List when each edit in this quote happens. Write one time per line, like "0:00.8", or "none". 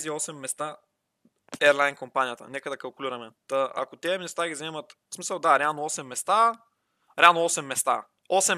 0:01.4